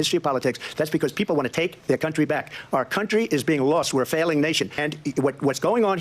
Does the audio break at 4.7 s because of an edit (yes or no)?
yes